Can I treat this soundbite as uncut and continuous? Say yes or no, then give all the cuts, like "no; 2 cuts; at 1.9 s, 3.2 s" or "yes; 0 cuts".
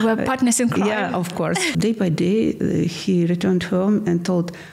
no; 1 cut; at 1.7 s